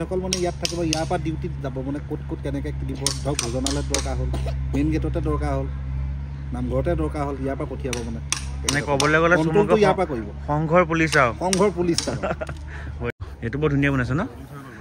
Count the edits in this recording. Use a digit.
1